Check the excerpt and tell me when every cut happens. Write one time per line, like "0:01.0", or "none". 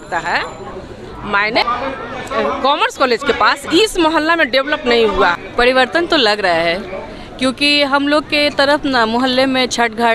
0:01.6
0:05.4